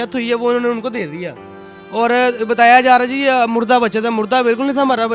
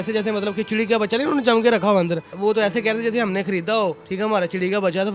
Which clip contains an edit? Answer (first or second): second